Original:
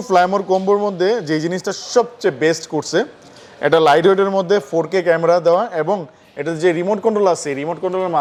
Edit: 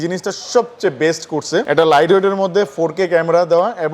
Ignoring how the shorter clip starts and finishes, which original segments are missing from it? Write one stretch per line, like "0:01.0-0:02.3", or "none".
0:03.1-0:03.6

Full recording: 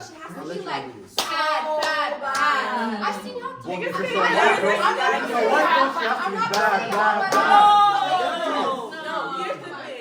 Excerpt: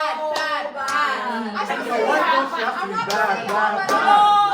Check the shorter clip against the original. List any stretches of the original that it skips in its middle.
0:03.2-0:05.2

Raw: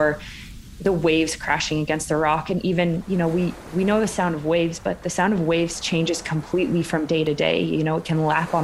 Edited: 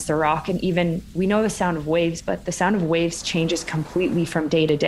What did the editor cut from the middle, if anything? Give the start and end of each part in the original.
0:03.0-0:03.6

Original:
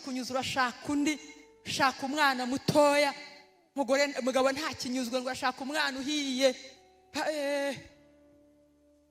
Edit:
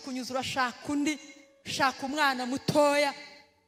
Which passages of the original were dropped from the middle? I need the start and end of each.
none

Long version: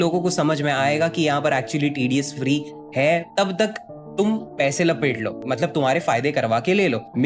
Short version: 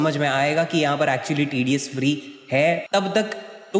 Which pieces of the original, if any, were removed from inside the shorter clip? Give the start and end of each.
none

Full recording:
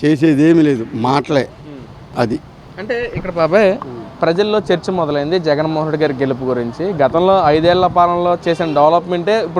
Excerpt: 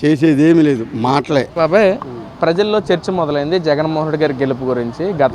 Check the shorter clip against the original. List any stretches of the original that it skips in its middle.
0:01.5-0:03.3

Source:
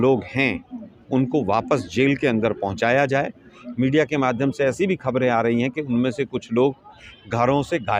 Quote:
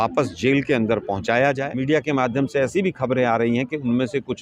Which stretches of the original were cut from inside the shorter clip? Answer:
0:03.2-0:03.7

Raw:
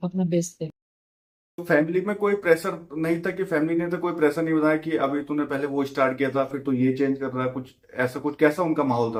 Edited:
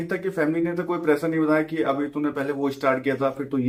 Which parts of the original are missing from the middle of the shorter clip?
none

